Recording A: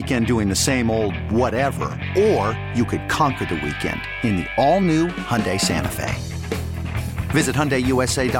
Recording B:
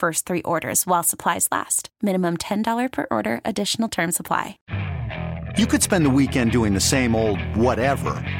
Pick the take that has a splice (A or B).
B